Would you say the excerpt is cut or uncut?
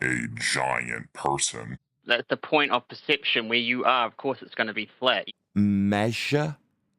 cut